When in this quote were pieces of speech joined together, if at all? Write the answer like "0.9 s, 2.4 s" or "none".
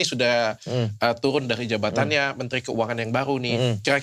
none